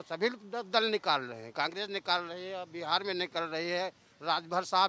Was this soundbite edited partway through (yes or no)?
no